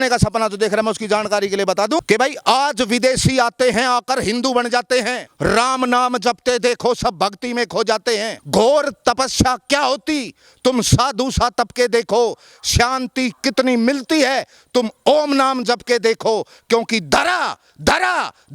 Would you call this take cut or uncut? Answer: cut